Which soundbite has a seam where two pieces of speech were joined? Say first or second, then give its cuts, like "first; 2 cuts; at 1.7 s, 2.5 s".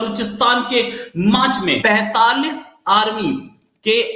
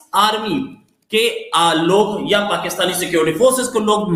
first; 1 cut; at 1.8 s